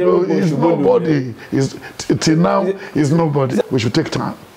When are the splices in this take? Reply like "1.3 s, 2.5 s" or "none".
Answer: 3.6 s